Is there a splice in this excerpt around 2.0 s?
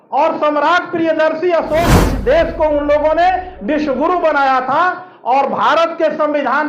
yes; 1 cut; at 2.0 s

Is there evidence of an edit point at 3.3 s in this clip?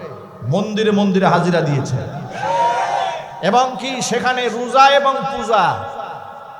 yes; 1 cut; at 3.3 s

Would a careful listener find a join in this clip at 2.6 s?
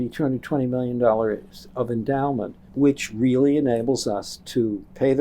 yes; 1 cut; at 2.6 s

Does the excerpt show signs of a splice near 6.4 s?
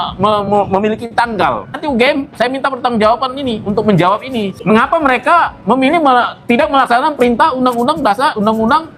no; 2 cuts; at 1.8 s, 4.5 s

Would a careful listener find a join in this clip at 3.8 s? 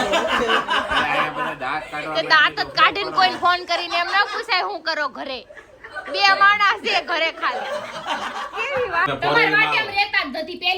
no; 2 cuts; at 5.6 s, 9.1 s

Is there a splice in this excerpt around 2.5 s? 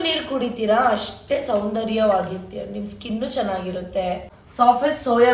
no; 1 cut; at 4.4 s

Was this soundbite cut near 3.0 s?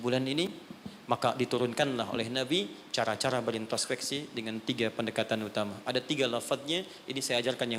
no; 0 cuts

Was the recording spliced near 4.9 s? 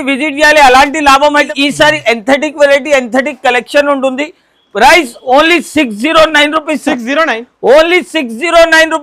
no; 1 cut; at 1.5 s

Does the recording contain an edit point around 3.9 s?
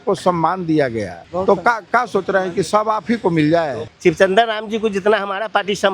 yes; 2 cuts; at 1.2 s, 3.9 s

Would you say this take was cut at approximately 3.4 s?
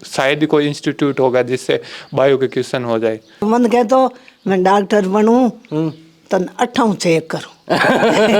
yes; 1 cut; at 3.4 s

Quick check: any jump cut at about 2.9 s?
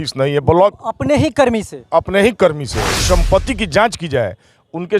yes; 1 cut; at 2.9 s

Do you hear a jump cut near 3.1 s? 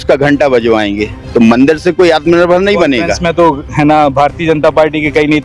yes; 2 cuts; at 1.2 s, 3.1 s

